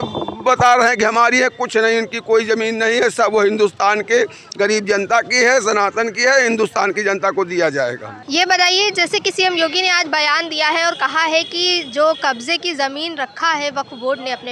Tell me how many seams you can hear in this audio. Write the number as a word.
zero